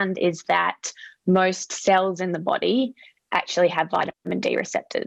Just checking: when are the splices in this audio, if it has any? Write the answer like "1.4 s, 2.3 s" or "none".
none